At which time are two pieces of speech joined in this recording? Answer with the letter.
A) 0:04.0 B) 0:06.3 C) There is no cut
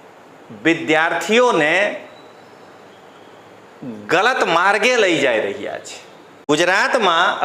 B